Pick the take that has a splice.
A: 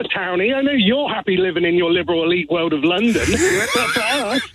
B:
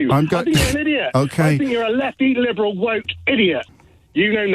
B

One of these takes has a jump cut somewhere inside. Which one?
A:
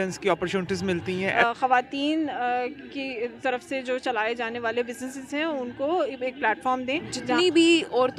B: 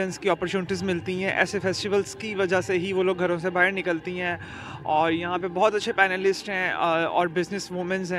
A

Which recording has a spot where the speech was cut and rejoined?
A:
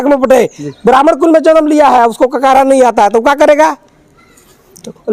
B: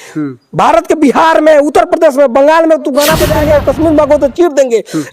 B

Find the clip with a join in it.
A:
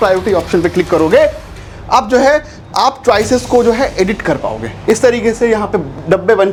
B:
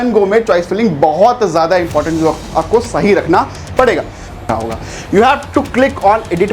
B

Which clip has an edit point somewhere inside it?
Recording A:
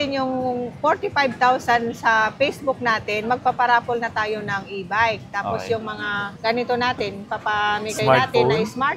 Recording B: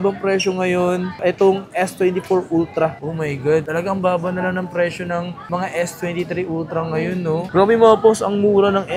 B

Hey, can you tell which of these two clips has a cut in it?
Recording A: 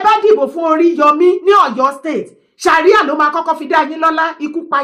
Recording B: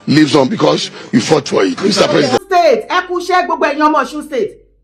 B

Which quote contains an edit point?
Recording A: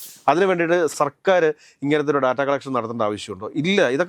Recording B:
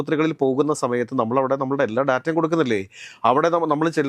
A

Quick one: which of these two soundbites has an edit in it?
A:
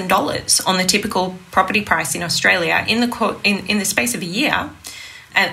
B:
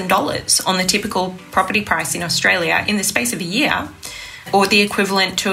B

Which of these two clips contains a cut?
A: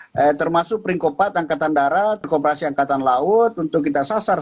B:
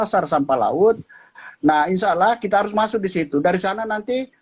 A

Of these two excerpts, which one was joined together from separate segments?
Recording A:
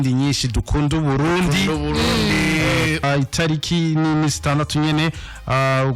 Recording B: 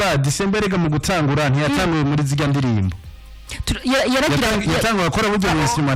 A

